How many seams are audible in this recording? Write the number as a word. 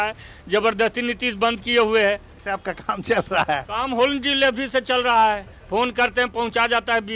one